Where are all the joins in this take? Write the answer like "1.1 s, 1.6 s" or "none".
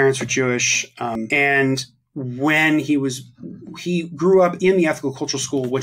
1.2 s